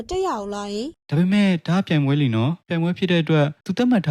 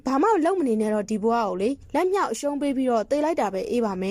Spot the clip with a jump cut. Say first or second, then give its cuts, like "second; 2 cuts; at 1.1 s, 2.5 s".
first; 1 cut; at 1.0 s